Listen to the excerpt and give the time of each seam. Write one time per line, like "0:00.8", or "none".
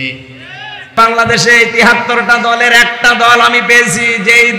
0:01.0